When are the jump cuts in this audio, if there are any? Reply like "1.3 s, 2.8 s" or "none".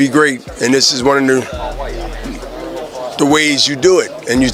none